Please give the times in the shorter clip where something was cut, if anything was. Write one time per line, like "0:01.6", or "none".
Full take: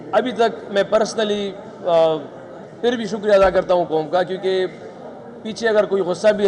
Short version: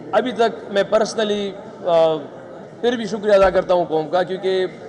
none

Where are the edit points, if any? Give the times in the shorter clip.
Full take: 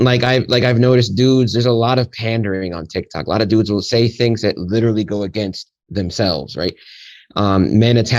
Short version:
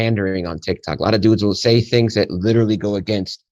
none

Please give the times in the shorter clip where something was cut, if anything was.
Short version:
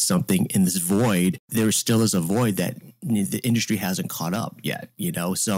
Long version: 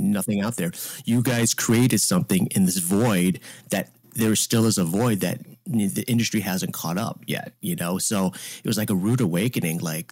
0:01.4

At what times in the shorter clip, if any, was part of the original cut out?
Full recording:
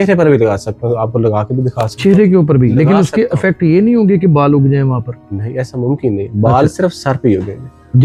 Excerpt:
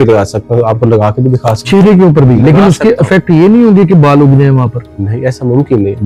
none

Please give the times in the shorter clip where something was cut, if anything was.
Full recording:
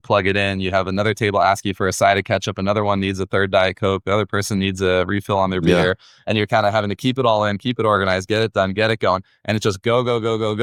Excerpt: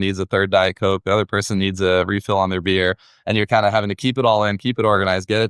none

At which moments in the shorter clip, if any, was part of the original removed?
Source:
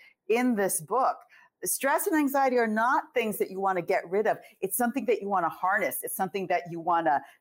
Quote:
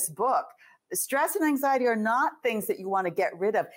none

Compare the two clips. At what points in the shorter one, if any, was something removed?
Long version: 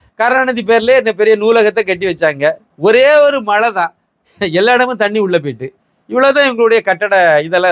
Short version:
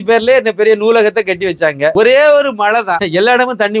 0:01.9
0:03.0

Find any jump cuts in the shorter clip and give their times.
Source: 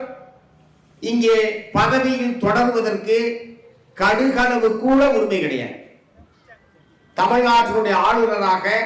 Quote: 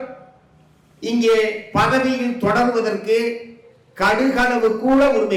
none

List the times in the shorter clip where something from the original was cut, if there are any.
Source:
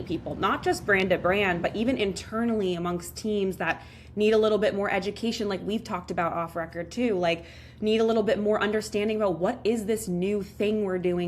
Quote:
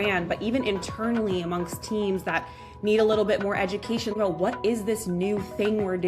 0:04.2

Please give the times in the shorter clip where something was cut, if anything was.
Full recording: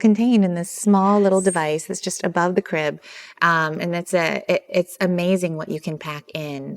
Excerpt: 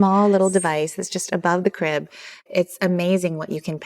0:02.5

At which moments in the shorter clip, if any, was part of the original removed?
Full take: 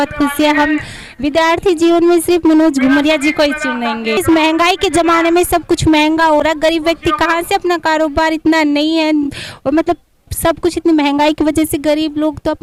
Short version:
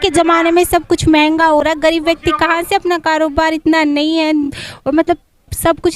none

